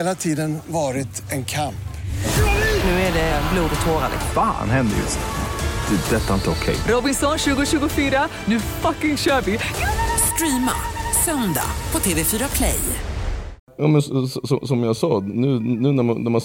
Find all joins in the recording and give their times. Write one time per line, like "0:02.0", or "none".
0:13.7